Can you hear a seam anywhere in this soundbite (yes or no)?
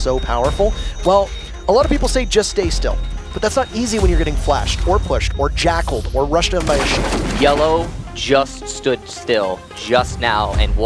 no